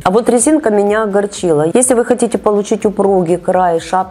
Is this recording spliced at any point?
yes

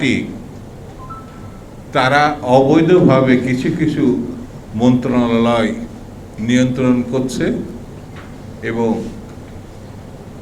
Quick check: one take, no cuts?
yes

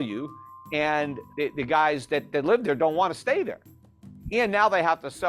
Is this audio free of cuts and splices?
no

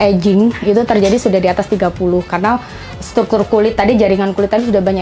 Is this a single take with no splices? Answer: yes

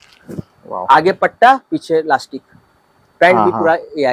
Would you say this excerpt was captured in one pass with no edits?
yes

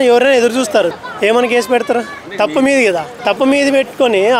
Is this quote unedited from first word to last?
no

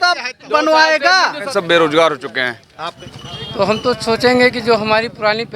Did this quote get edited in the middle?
yes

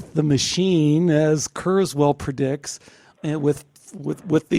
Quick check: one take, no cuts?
yes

